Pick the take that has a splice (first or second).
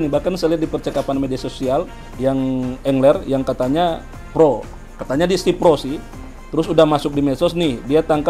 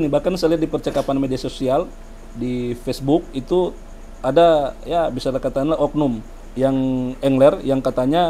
first